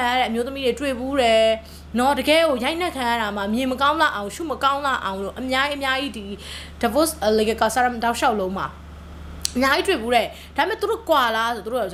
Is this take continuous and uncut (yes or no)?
yes